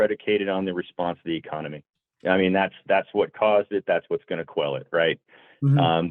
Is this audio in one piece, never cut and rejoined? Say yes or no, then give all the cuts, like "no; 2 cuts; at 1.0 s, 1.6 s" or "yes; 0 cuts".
yes; 0 cuts